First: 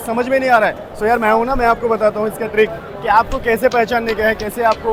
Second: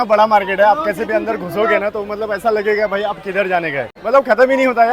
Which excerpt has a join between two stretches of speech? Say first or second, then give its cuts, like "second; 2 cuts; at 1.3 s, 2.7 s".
second; 1 cut; at 3.9 s